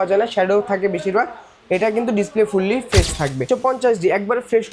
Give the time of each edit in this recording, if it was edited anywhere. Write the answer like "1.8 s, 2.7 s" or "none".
3.5 s

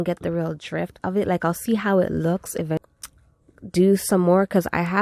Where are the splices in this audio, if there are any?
2.8 s

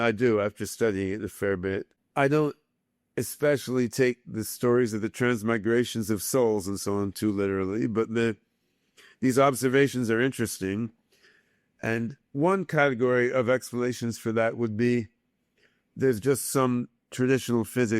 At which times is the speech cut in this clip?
2.0 s

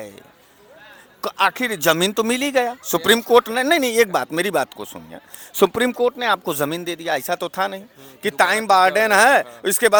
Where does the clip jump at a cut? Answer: none

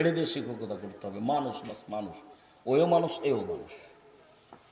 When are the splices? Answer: none

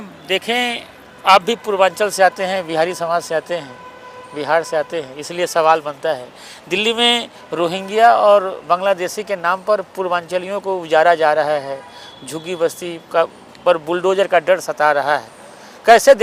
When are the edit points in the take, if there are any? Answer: none

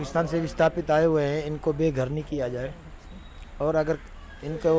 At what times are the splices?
none

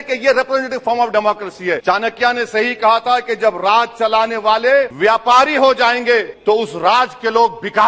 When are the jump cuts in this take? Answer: 1.8 s, 4.9 s, 6.3 s

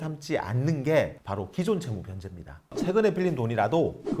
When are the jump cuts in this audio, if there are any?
2.7 s

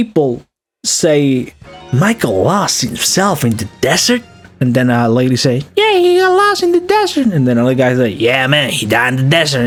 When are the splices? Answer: none

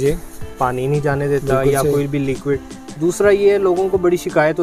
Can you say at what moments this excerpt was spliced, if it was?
none

